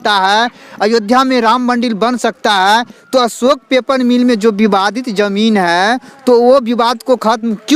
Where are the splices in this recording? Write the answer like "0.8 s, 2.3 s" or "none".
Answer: none